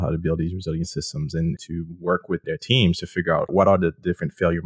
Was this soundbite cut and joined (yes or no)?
yes